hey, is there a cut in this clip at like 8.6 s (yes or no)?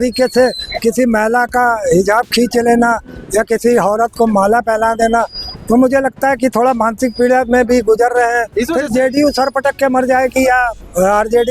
yes